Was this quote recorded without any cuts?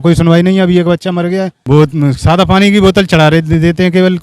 no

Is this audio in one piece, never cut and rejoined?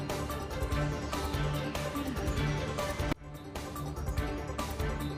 yes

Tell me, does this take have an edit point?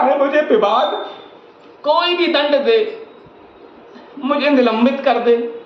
no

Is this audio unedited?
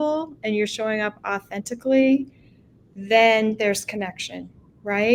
yes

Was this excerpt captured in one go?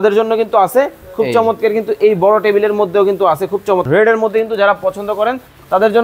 no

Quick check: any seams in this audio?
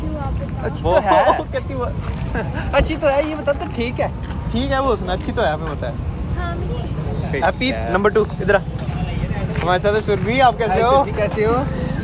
no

